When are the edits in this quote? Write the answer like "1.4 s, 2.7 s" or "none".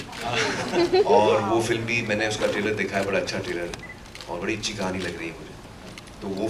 none